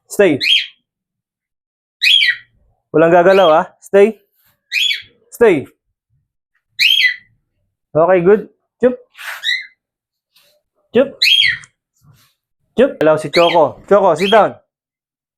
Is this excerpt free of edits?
no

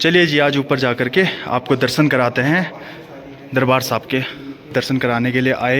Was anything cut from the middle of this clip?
yes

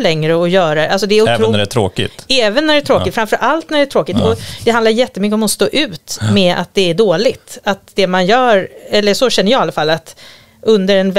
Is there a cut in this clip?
no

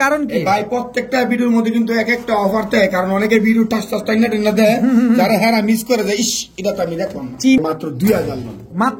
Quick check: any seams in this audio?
yes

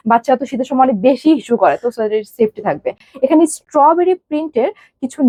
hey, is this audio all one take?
yes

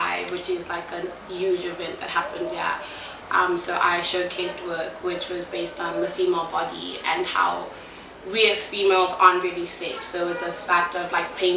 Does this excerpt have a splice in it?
no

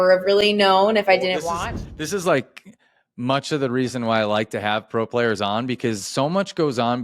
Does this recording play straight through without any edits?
no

